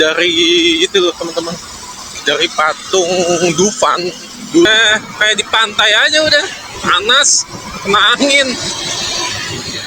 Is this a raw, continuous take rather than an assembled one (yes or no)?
no